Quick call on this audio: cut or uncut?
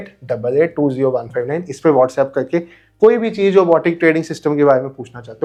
uncut